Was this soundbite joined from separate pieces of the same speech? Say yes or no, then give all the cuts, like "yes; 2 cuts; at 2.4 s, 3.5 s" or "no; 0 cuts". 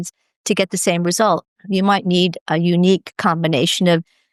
no; 0 cuts